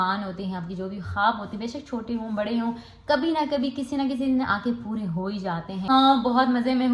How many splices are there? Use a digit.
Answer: 1